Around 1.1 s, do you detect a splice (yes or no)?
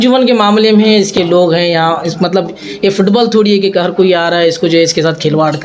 yes